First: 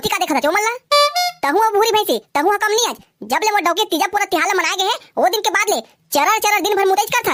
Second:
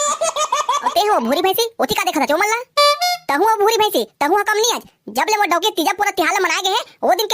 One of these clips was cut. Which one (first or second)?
second